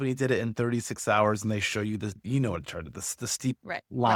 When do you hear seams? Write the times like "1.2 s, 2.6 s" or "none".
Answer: none